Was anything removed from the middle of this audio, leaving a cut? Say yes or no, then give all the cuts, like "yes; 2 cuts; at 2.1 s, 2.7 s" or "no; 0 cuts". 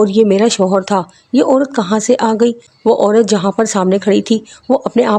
no; 0 cuts